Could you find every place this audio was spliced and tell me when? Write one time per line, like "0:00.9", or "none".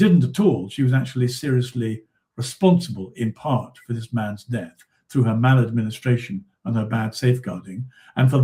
none